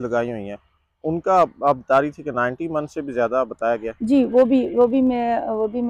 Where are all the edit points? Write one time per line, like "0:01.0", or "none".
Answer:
none

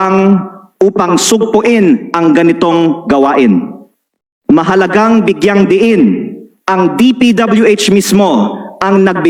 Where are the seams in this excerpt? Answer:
none

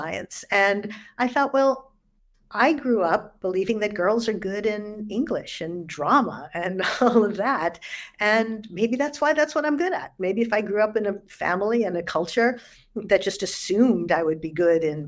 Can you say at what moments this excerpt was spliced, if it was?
none

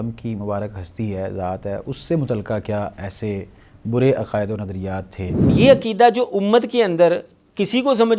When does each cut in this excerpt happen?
0:05.5

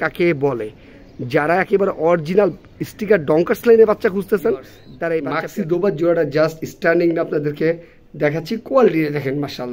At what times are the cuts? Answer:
0:05.4

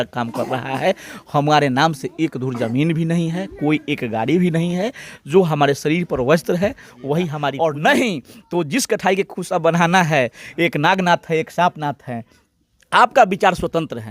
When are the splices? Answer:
0:07.5

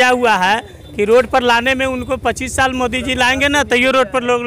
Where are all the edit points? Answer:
none

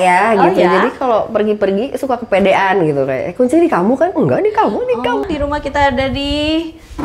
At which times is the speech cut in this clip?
0:05.2

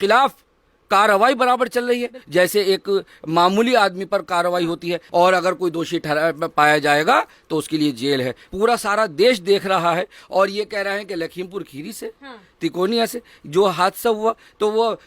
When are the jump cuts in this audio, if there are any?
0:02.1
0:05.0
0:08.4

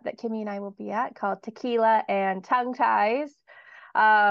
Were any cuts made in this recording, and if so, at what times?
none

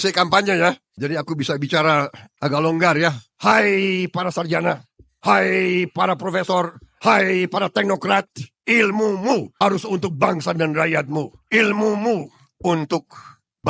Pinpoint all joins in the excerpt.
0:02.2
0:03.3

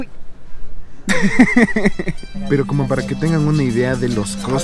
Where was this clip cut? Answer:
0:02.3

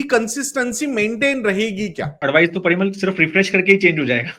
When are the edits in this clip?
0:02.2

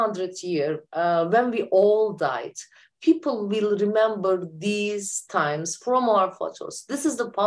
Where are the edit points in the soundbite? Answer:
none

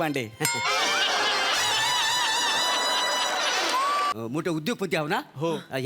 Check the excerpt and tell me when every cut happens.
0:04.1

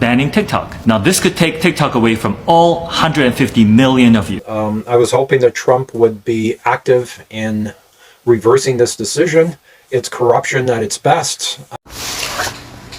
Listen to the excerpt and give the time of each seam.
0:04.4
0:11.8

